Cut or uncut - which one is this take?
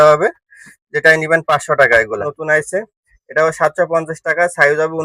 cut